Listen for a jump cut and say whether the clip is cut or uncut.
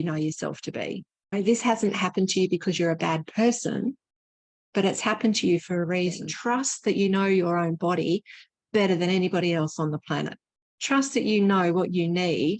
cut